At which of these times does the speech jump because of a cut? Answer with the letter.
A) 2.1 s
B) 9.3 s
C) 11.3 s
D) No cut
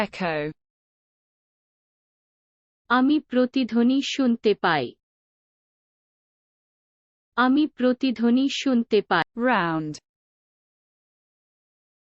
B